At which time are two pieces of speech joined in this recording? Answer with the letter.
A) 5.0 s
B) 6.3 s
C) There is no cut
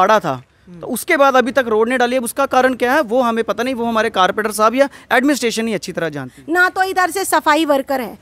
B